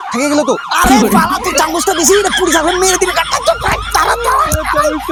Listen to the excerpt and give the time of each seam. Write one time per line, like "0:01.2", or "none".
none